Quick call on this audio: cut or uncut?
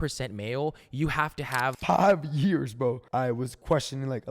cut